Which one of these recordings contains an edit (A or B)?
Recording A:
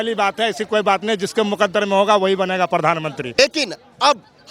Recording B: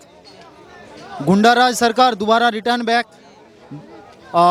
A